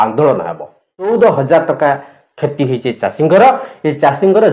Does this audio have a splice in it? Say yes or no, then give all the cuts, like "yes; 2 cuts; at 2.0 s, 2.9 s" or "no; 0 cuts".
yes; 1 cut; at 1.1 s